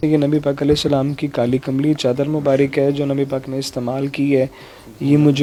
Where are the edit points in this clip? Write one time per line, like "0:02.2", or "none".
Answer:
none